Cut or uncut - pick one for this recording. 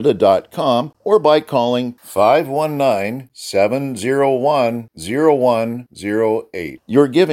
cut